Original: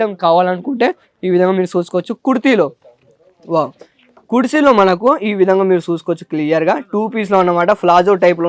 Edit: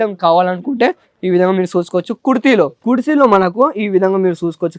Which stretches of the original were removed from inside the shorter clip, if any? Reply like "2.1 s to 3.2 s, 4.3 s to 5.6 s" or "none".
2.8 s to 4.2 s